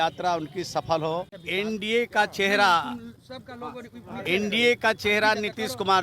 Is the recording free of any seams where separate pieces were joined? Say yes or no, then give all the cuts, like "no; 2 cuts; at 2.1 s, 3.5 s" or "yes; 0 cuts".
no; 1 cut; at 1.4 s